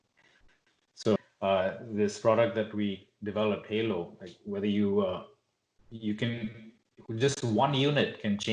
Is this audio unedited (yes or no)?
no